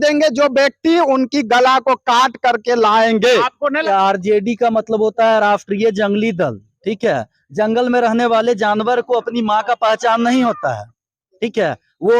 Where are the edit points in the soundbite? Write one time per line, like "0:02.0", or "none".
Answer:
0:03.8